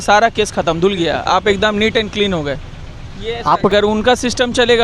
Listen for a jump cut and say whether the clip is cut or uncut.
cut